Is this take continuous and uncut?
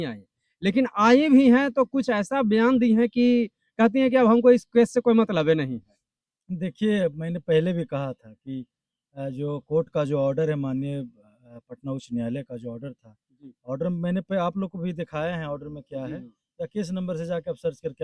yes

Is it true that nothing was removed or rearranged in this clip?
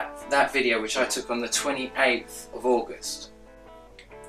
yes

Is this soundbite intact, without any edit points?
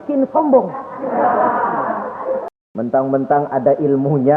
no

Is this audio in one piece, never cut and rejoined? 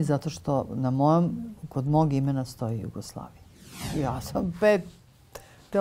no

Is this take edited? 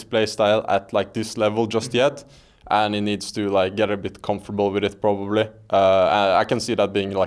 no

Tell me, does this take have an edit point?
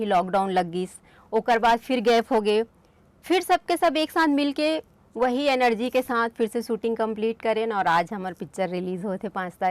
no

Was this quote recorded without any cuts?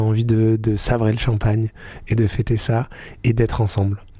yes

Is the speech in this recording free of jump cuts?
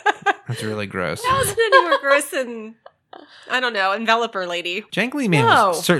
no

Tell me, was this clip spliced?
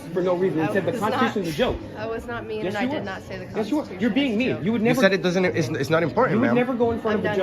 no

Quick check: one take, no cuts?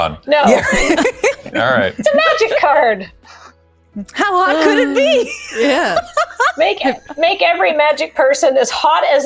yes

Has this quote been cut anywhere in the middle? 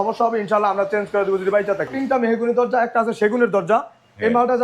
yes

